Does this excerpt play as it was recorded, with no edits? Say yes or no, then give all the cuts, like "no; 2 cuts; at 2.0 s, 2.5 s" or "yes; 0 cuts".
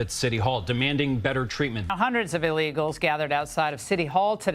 no; 1 cut; at 1.8 s